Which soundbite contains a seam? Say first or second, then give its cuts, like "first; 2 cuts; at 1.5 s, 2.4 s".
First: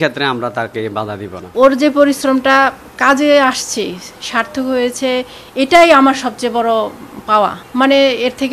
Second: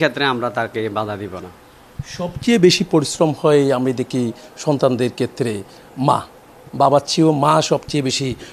first; 2 cuts; at 1.3 s, 7.6 s